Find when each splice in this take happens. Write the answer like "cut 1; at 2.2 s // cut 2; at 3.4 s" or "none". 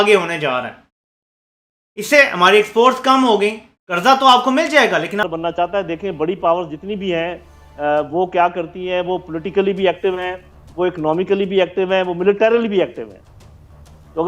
cut 1; at 5.2 s

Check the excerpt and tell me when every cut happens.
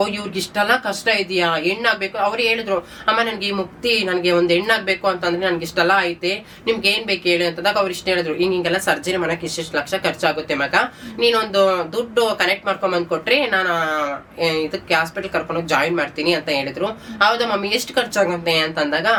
none

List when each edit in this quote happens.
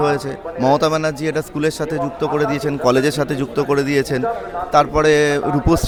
none

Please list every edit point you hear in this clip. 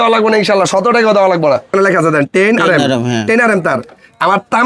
cut 1; at 1.7 s

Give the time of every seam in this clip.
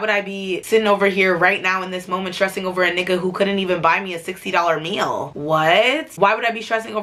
none

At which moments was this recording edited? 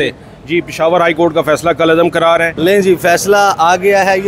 cut 1; at 2.5 s

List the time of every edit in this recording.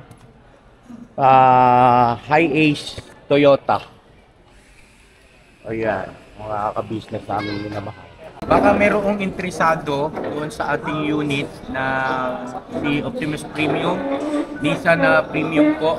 cut 1; at 8.3 s

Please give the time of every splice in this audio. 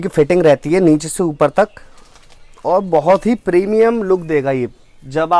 none

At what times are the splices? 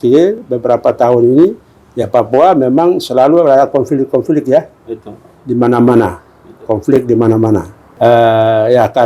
cut 1; at 7.8 s

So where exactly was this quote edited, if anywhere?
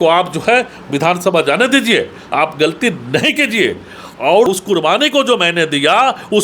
cut 1; at 4.5 s

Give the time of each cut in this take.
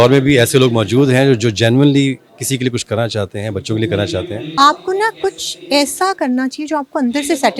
cut 1; at 4.5 s

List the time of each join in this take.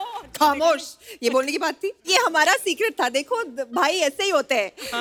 none

